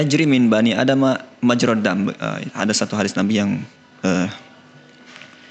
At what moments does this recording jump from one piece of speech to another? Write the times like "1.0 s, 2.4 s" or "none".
none

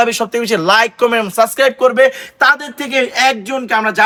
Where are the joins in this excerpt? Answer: none

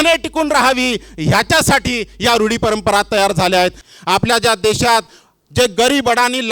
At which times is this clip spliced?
3.8 s

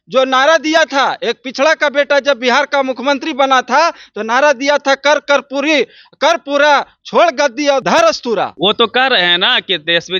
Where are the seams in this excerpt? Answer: 7.8 s, 8.5 s

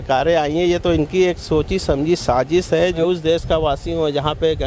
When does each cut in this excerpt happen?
3.0 s

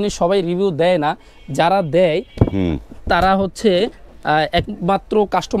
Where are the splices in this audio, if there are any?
none

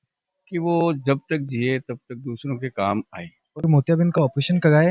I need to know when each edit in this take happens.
3.6 s

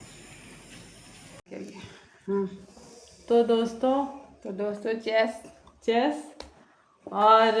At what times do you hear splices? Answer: 1.4 s

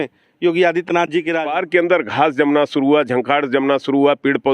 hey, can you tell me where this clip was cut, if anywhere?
1.6 s

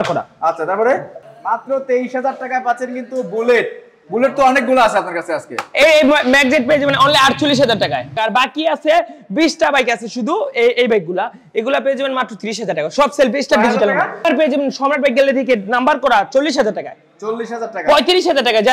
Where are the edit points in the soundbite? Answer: 1.2 s, 8.1 s, 14.3 s

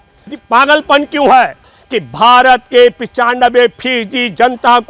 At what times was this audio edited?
1.6 s

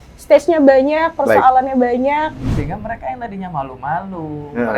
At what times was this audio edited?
2.5 s

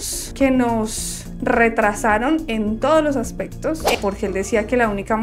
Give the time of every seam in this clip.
3.9 s

